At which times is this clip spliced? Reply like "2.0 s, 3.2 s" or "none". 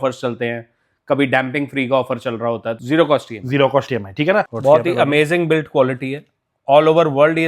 2.7 s, 4.5 s